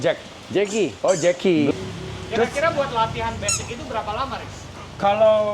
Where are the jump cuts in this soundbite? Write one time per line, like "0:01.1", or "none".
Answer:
0:01.7